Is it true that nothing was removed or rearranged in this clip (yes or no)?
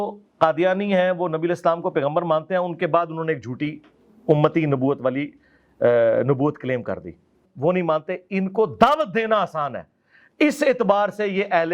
no